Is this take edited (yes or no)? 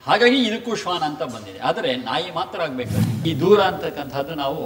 yes